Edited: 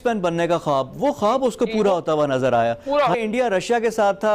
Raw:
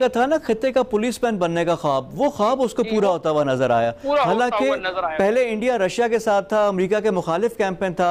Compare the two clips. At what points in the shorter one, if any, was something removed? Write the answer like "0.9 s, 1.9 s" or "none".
3.2 s